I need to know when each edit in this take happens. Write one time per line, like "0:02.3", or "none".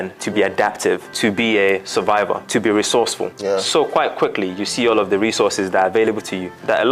0:01.1